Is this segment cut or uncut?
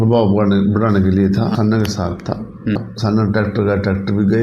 cut